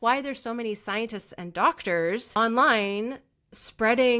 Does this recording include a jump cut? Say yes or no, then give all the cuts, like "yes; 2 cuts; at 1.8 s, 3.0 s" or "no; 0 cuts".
yes; 1 cut; at 2.4 s